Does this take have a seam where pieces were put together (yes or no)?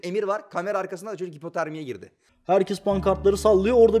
yes